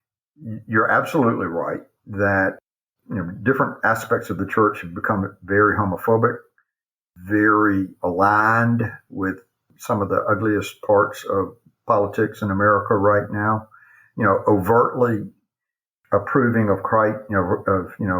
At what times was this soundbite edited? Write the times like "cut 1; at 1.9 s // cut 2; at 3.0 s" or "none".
cut 1; at 2.6 s

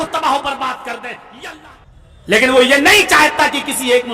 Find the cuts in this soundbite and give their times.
cut 1; at 1.5 s

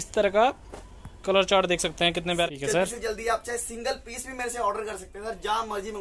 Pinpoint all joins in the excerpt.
cut 1; at 2.5 s

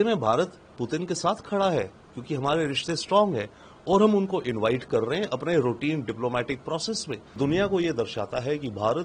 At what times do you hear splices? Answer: cut 1; at 7.4 s

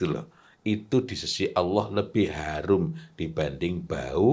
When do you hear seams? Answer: none

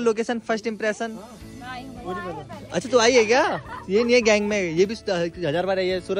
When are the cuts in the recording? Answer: none

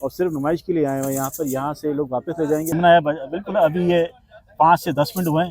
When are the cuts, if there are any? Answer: cut 1; at 2.7 s

